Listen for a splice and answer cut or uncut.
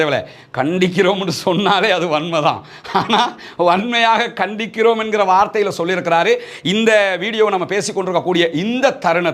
uncut